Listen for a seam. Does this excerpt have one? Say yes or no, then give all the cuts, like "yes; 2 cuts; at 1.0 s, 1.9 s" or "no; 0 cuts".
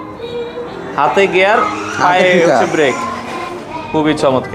no; 0 cuts